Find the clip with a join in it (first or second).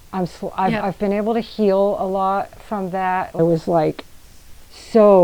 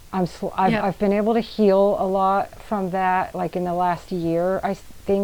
first